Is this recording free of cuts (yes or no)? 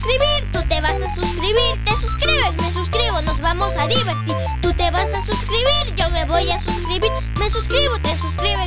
yes